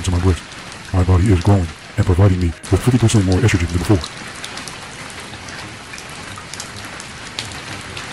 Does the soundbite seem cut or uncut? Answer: cut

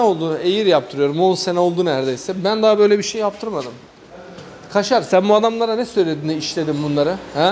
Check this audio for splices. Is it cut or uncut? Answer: uncut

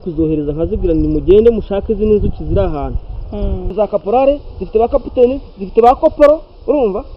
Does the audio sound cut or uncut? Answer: cut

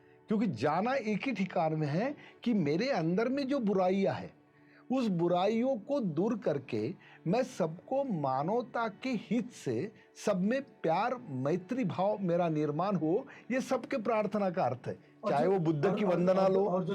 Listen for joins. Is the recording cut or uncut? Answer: uncut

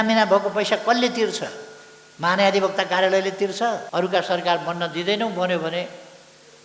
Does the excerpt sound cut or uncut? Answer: uncut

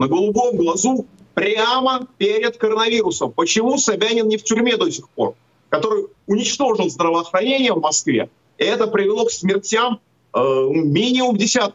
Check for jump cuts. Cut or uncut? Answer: uncut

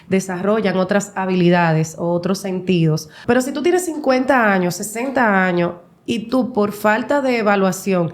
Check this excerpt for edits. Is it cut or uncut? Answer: cut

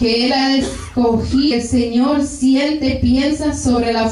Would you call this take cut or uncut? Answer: uncut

